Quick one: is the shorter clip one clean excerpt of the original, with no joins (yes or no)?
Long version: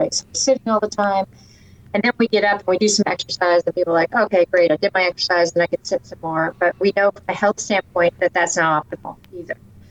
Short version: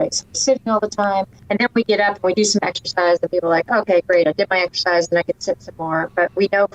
no